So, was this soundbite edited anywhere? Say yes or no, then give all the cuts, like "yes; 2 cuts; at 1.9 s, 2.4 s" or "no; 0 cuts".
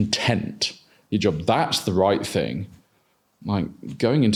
no; 0 cuts